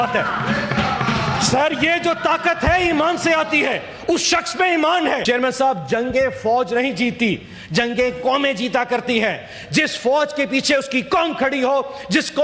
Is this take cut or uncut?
cut